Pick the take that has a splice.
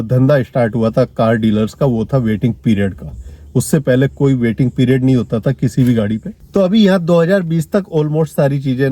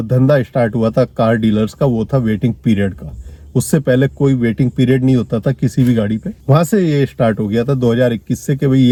first; 1 cut; at 6.3 s

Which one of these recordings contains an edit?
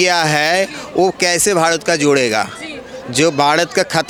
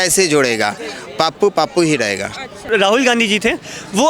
second; 1 cut; at 2.7 s

